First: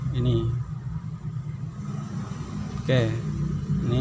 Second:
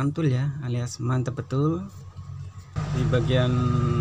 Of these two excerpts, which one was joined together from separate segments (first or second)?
second